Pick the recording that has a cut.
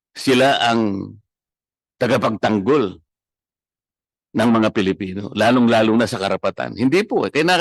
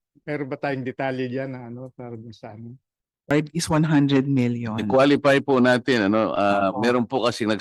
second; 1 cut; at 3.3 s

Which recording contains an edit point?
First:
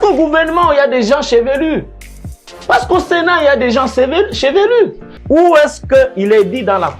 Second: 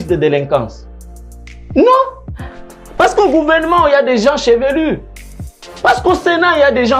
first; 1 cut; at 5.1 s

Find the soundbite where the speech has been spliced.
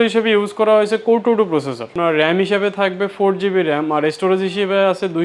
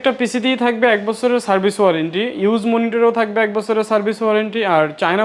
first; 1 cut; at 1.9 s

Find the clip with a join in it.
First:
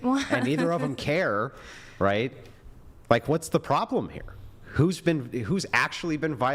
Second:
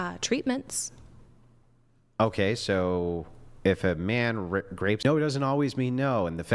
second; 1 cut; at 5.0 s

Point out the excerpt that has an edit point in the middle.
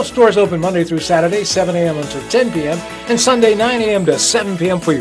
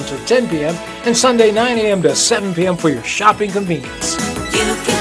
second; 1 cut; at 4.0 s

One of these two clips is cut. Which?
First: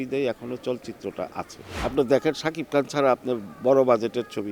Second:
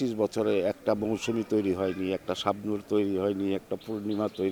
first; 1 cut; at 1.6 s

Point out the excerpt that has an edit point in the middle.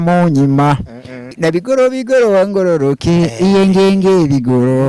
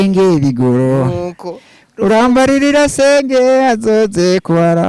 first; 1 cut; at 1.3 s

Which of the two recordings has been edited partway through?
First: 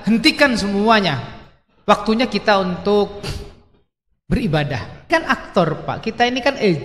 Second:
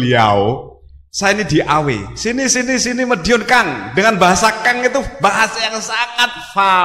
first; 1 cut; at 5.1 s

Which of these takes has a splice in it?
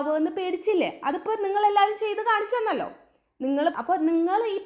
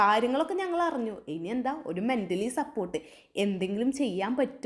first; 1 cut; at 3.8 s

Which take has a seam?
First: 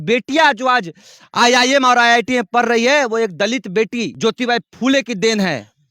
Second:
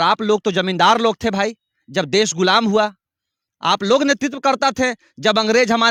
first; 1 cut; at 4.1 s

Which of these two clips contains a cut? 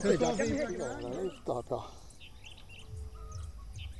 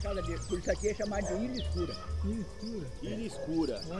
first; 1 cut; at 0.9 s

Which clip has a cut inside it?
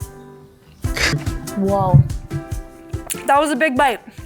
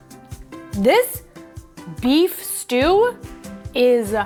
first; 1 cut; at 1.1 s

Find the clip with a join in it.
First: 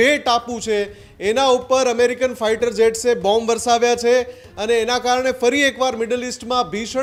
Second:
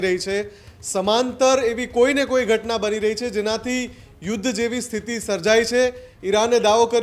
second; 1 cut; at 6.1 s

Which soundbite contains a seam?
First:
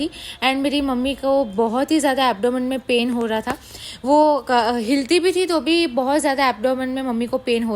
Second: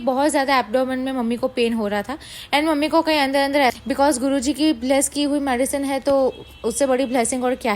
second; 1 cut; at 3.8 s

